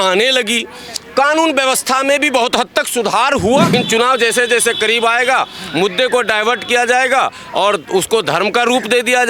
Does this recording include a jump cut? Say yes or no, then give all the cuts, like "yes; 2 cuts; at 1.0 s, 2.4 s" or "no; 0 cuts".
yes; 1 cut; at 3.7 s